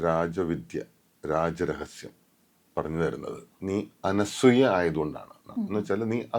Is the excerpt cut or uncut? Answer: cut